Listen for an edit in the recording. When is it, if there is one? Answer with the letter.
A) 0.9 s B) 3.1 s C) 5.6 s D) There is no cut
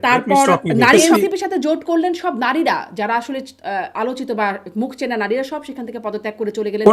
A